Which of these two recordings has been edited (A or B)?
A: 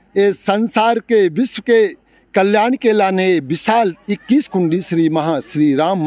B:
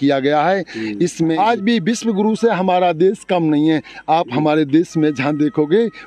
B